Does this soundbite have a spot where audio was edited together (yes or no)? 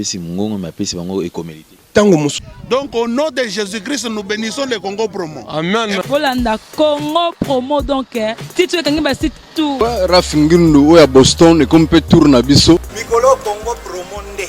yes